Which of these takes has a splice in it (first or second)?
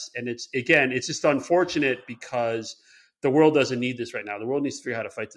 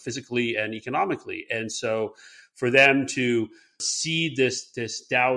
second